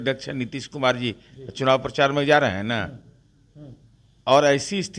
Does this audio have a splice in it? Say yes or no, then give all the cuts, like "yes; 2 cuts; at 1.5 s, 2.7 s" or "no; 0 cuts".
no; 0 cuts